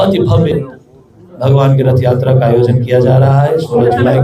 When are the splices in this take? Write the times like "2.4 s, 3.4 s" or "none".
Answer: none